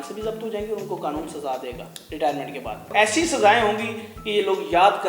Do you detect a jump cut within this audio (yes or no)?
yes